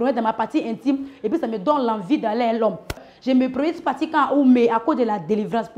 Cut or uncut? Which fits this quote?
cut